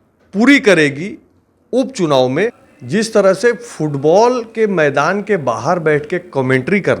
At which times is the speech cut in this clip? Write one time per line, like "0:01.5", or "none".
0:02.6